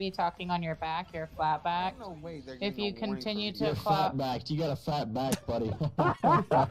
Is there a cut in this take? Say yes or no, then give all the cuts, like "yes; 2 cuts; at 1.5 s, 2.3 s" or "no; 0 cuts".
no; 0 cuts